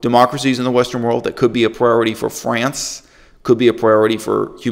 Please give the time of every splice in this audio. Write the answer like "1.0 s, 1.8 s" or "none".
none

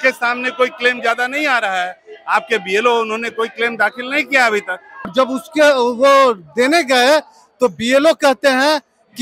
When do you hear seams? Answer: 5.1 s

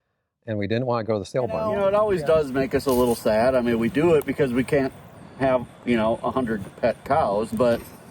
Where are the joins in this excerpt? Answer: 1.6 s

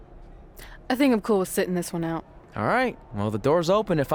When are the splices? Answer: none

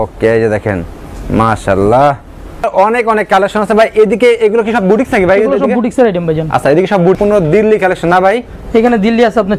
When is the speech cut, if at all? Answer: 2.7 s, 7.2 s

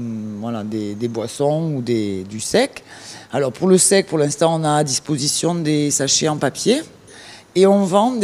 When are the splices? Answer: 3.1 s

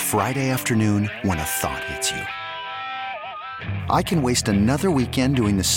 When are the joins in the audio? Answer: none

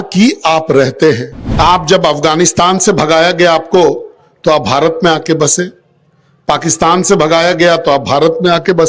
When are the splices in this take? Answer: 1.4 s

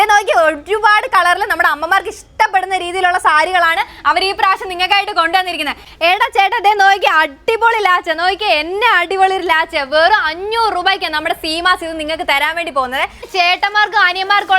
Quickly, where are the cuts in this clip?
5.8 s, 13.2 s

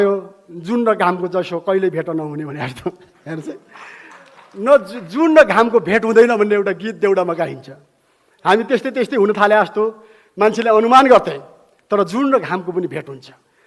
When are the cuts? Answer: none

